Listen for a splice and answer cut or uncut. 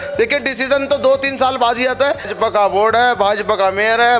cut